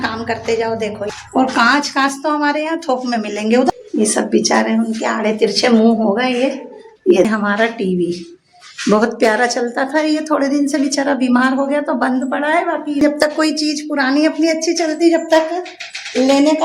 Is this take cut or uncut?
cut